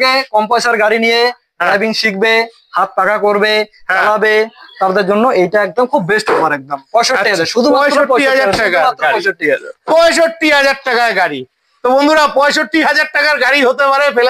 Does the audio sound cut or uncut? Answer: uncut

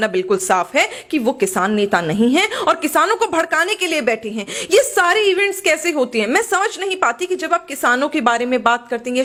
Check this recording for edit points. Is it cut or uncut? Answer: uncut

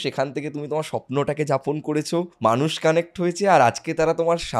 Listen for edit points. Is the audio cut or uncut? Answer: cut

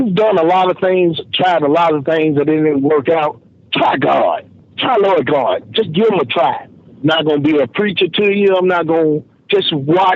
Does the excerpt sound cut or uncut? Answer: uncut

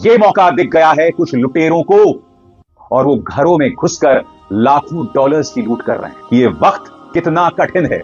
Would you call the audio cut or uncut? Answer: cut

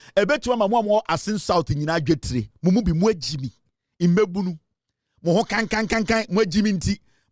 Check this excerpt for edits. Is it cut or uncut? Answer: uncut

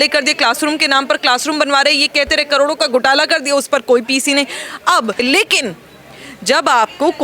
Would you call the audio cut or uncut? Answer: cut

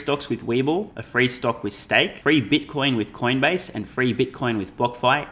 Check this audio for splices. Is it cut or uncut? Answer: cut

